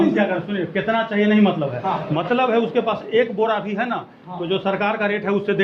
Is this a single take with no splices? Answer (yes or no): yes